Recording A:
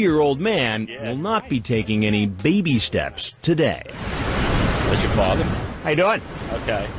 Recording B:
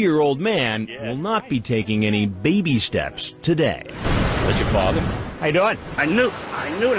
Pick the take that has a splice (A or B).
B